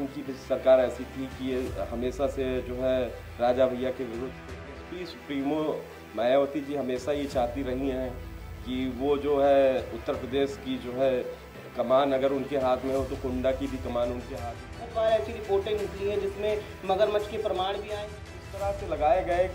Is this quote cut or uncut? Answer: cut